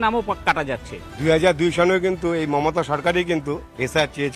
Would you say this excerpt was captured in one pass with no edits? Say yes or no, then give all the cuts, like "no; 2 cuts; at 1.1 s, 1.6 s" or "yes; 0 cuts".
yes; 0 cuts